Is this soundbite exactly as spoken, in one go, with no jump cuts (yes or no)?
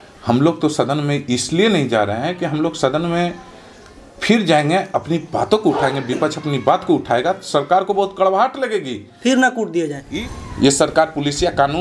no